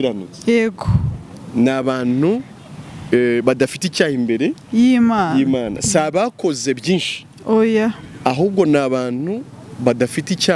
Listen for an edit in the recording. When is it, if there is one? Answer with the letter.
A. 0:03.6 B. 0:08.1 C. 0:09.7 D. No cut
D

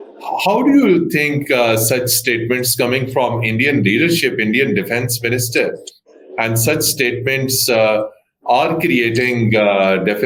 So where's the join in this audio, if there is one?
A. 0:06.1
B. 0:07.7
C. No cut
C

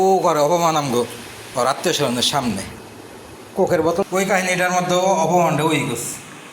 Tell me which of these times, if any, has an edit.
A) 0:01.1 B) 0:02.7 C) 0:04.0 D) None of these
C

